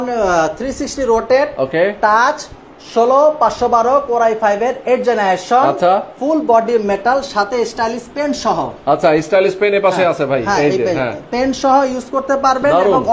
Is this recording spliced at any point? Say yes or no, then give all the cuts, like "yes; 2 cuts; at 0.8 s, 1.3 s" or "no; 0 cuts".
no; 0 cuts